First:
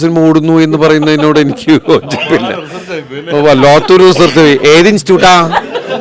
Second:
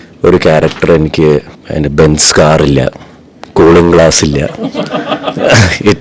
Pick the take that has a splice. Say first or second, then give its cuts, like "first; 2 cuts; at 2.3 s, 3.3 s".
second; 1 cut; at 1.6 s